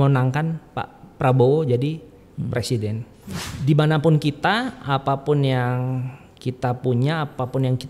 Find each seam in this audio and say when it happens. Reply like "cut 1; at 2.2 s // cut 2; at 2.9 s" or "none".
cut 1; at 3.4 s